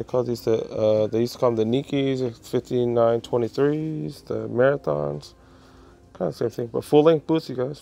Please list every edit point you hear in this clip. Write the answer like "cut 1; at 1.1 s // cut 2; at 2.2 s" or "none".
none